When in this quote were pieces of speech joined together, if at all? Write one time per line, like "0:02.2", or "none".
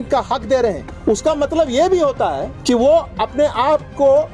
0:00.9
0:02.5